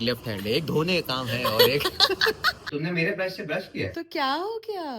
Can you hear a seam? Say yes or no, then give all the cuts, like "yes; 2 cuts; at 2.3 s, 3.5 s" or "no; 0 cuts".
yes; 2 cuts; at 2.5 s, 3.9 s